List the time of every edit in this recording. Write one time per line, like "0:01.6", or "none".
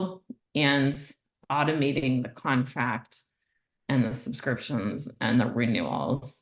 none